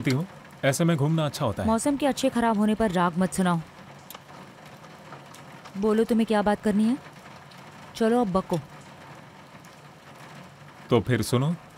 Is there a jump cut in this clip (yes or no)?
no